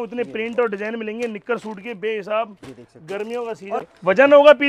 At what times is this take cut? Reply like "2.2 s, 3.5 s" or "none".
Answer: 3.7 s